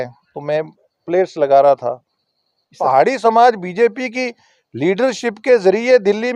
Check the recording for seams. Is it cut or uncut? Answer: cut